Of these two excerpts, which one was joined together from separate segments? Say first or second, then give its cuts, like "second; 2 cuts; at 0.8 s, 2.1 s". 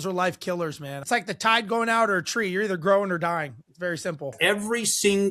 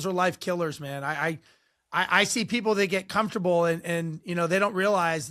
first; 2 cuts; at 1.0 s, 4.3 s